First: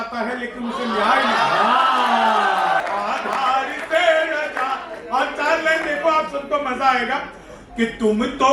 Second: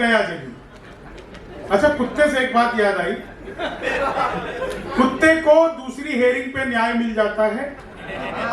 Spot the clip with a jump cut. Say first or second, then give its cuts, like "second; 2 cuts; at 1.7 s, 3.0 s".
first; 1 cut; at 2.8 s